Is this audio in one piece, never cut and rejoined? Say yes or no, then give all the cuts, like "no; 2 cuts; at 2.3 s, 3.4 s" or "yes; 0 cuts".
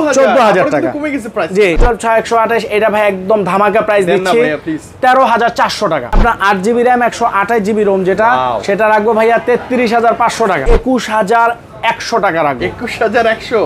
no; 3 cuts; at 1.8 s, 6.2 s, 10.6 s